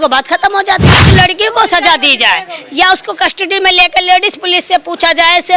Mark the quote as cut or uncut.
cut